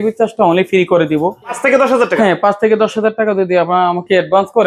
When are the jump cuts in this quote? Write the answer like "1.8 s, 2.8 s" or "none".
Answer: 1.5 s